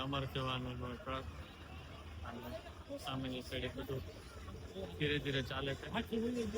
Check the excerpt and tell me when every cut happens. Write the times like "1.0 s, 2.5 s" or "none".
none